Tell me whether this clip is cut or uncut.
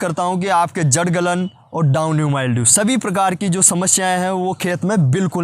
uncut